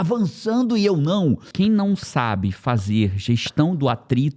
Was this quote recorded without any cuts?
no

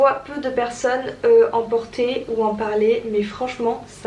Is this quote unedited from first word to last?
yes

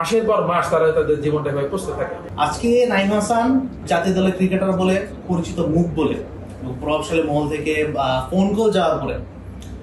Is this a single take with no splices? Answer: no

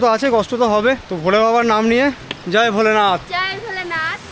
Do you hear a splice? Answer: yes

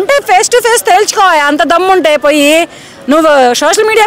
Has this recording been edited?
no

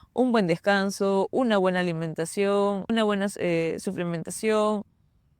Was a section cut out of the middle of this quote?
yes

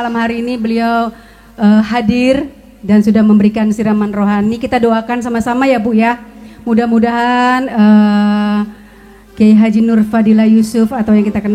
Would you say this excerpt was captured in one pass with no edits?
yes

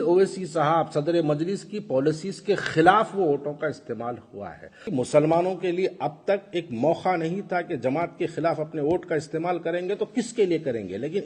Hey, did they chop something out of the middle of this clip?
yes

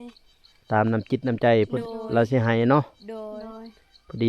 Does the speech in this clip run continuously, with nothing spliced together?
yes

